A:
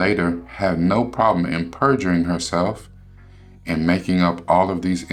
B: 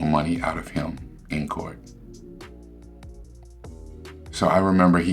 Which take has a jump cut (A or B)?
B